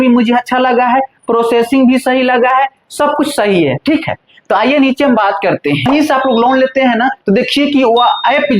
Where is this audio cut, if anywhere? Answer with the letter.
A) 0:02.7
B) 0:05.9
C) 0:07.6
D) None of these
B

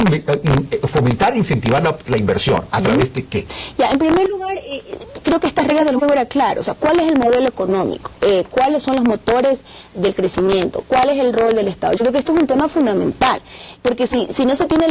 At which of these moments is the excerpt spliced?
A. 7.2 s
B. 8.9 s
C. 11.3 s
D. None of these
B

